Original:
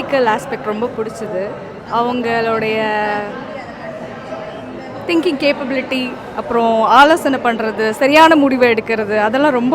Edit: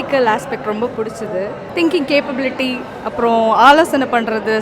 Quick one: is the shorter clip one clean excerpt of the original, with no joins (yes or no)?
no